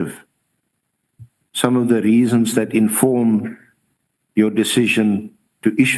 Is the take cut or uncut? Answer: uncut